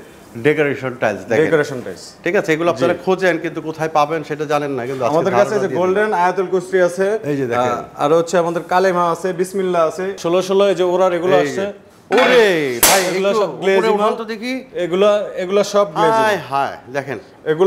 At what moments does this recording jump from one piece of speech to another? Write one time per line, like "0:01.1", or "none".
0:10.2